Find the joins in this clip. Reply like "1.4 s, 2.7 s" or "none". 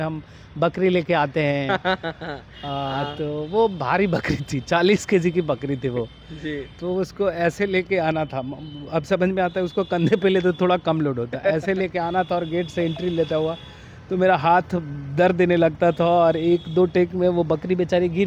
none